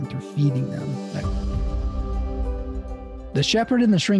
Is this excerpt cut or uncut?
cut